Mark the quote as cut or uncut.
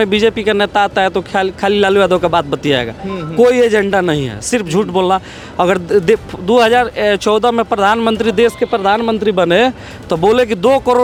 uncut